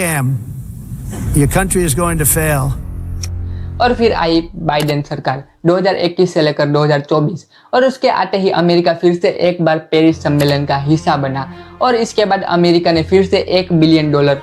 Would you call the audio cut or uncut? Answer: uncut